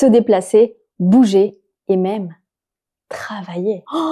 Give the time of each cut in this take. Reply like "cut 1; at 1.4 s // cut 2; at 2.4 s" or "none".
none